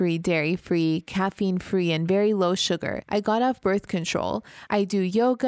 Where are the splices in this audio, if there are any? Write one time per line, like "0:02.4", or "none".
0:02.9
0:04.5